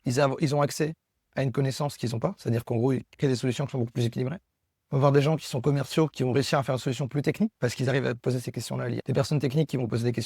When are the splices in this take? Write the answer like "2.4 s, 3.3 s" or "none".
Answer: 9.0 s